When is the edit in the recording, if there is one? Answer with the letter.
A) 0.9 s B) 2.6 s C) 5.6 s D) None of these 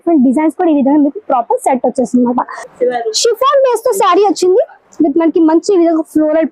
B